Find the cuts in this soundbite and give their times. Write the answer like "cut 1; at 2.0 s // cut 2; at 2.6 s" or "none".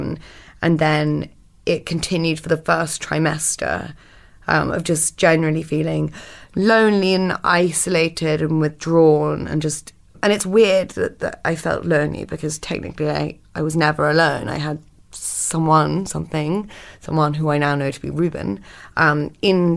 cut 1; at 2.6 s